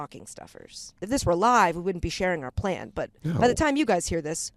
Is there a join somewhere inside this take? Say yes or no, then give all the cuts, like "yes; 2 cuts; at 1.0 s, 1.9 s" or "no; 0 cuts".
yes; 1 cut; at 1.0 s